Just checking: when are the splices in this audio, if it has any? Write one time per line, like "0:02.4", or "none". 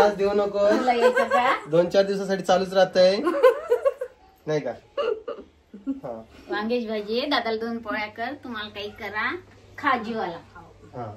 none

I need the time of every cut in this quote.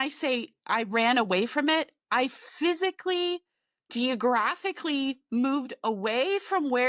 none

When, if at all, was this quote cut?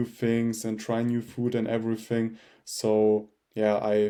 none

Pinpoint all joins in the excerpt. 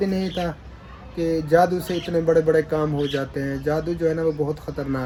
none

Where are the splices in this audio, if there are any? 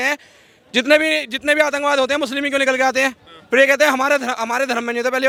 none

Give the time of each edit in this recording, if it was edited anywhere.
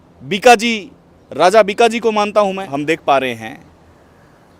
0:02.7

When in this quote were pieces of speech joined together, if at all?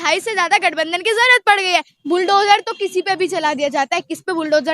0:01.9

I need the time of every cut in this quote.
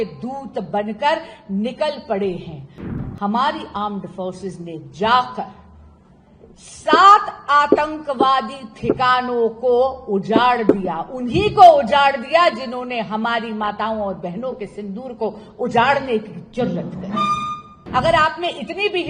0:02.9
0:17.8

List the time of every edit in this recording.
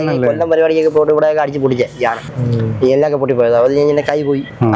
none

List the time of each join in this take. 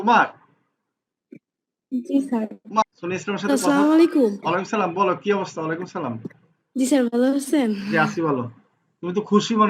0:02.8

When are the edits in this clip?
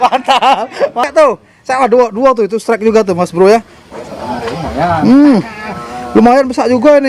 0:01.0

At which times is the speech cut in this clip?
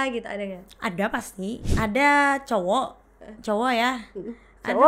0:01.7

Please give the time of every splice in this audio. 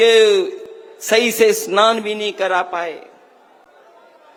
none

